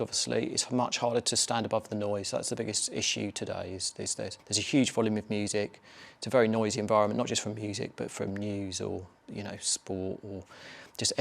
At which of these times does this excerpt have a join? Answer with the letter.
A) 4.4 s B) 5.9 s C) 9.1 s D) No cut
A